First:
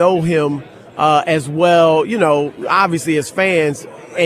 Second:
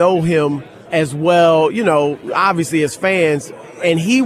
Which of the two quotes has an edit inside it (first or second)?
second